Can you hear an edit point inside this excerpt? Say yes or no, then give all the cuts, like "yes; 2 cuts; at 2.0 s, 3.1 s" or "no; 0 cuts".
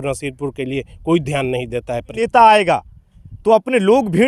yes; 1 cut; at 2.2 s